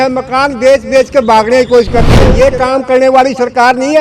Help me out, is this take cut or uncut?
cut